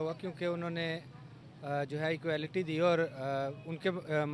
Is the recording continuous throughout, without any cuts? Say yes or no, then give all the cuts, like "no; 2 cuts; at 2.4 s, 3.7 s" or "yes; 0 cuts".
yes; 0 cuts